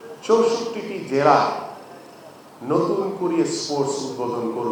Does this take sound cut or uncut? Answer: uncut